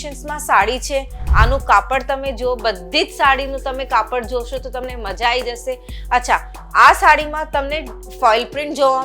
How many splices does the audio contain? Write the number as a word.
one